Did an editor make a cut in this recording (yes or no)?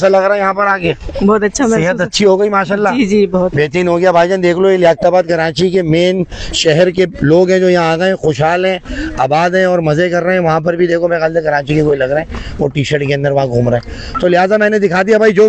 no